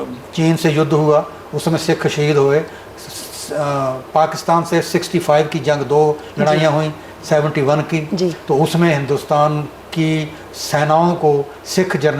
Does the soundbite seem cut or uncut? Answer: uncut